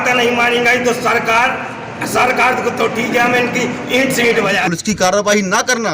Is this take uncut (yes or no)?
no